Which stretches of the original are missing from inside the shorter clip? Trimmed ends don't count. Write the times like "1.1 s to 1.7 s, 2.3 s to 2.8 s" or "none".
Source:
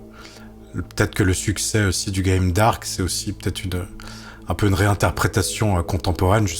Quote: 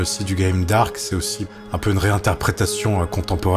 3.3 s to 4.2 s